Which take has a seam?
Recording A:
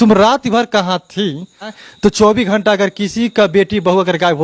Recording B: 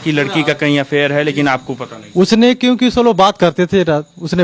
A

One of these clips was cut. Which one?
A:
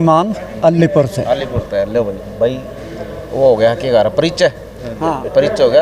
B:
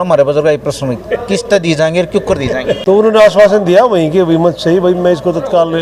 B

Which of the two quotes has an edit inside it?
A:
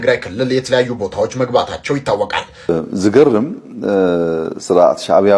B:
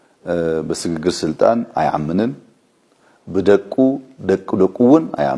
A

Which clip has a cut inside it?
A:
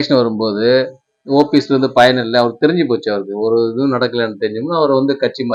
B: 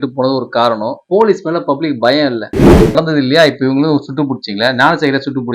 B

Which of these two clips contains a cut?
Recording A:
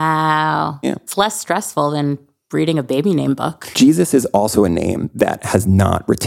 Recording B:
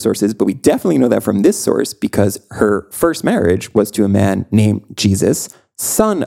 A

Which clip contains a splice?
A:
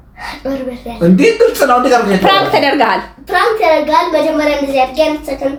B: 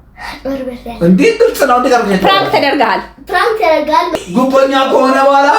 B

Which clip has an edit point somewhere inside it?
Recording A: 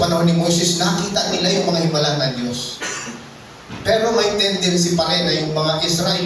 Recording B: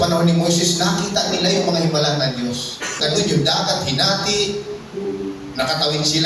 B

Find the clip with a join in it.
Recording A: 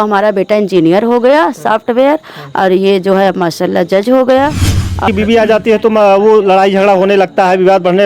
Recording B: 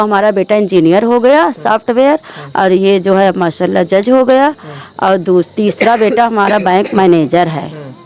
A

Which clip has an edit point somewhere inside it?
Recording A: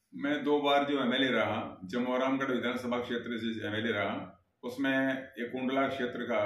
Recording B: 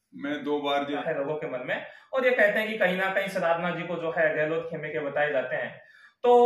B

